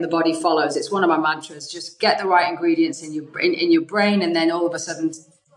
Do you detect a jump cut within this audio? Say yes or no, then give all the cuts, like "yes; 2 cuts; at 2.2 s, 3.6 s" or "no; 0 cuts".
no; 0 cuts